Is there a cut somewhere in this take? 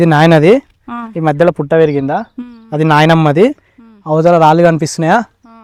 no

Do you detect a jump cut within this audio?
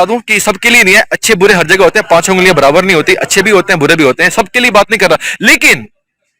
no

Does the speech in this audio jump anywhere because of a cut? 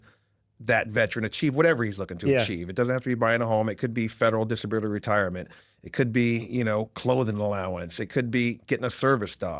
no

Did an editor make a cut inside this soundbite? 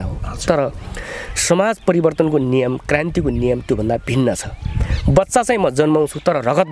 no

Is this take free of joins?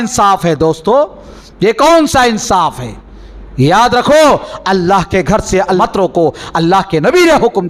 no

